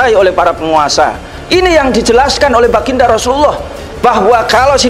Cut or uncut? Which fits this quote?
cut